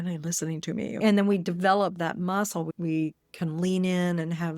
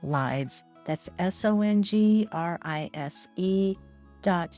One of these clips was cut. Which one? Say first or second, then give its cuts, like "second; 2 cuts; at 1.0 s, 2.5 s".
first; 1 cut; at 1.0 s